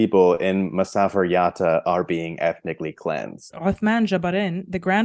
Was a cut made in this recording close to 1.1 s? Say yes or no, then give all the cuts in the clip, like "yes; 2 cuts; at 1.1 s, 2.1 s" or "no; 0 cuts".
no; 1 cut; at 3.5 s